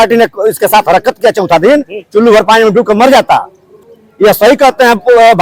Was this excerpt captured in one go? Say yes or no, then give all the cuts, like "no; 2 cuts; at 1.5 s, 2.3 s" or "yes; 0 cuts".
no; 1 cut; at 3.7 s